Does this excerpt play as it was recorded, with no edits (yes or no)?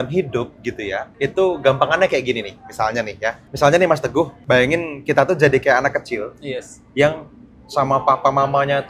no